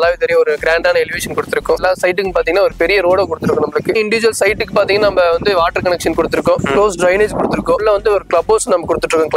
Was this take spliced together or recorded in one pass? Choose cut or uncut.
cut